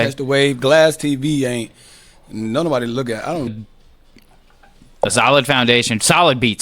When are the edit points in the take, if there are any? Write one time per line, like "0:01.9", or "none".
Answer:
0:03.5